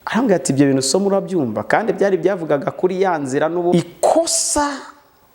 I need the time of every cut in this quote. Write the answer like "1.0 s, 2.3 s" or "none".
3.7 s